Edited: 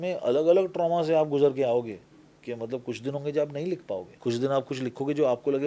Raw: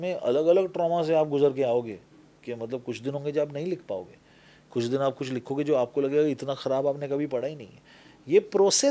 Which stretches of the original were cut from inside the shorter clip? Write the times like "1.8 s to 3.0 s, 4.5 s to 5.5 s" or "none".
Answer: 4.1 s to 4.6 s